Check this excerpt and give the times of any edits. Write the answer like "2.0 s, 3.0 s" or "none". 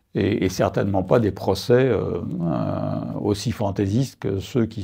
none